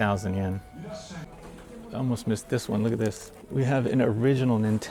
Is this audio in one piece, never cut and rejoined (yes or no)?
no